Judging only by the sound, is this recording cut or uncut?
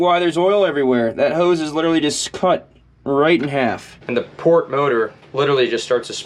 cut